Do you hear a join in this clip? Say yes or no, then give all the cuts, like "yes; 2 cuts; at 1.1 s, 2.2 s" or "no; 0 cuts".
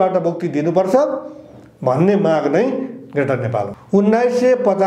yes; 1 cut; at 3.8 s